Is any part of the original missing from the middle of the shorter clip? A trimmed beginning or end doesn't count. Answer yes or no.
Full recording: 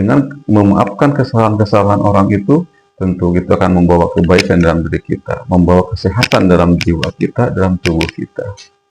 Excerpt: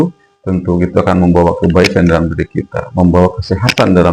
no